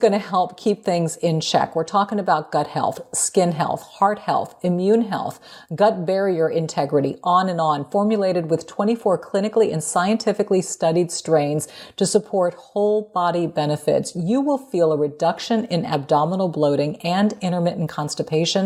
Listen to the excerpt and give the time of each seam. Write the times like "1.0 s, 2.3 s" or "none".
none